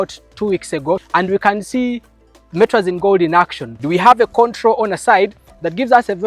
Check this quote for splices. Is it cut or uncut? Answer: cut